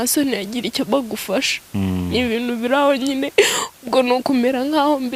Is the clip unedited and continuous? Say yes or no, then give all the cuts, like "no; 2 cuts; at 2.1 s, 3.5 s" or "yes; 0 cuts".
yes; 0 cuts